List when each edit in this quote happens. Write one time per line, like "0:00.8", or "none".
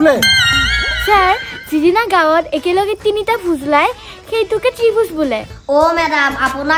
0:05.5

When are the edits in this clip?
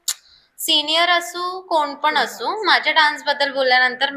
none

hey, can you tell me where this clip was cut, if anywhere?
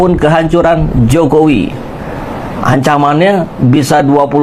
none

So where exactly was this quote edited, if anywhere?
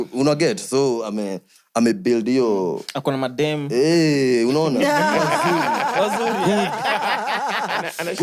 none

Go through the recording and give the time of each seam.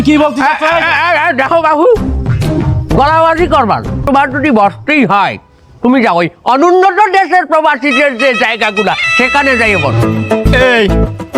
0:04.0

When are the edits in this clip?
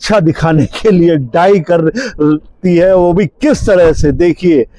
none

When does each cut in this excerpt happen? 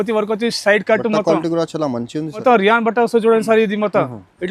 0:02.4

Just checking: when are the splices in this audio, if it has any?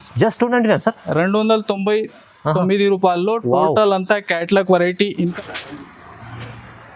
0:05.3

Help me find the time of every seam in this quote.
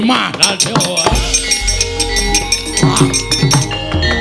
none

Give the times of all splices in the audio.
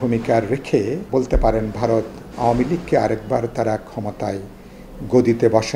0:01.0

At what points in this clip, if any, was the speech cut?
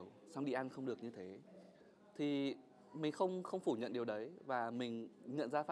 none

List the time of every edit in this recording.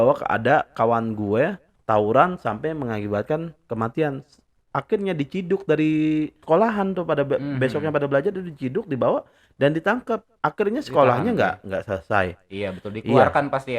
0:01.7
0:06.4

